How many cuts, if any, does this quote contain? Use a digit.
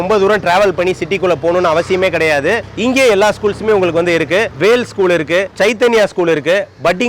0